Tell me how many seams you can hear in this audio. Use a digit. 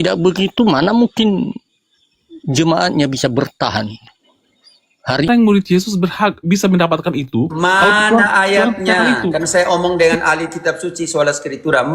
1